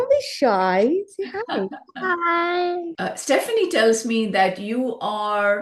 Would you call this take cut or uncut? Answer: cut